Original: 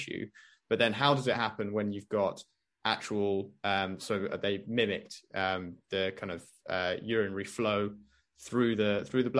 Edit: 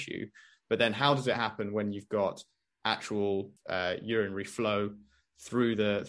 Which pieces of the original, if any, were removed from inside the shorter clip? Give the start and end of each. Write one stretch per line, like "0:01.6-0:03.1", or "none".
0:03.5-0:06.5